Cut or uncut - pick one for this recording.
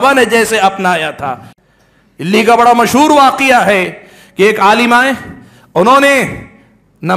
cut